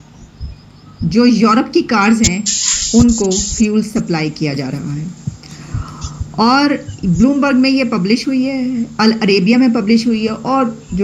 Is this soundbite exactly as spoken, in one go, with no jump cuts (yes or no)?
yes